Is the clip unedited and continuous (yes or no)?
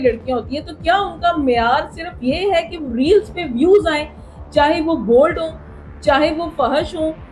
yes